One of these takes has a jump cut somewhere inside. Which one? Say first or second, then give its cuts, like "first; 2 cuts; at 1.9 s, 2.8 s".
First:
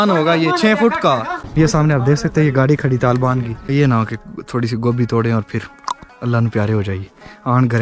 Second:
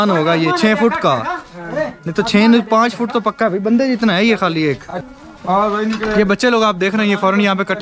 first; 2 cuts; at 1.4 s, 3.6 s